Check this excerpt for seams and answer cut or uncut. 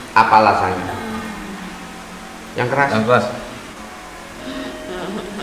cut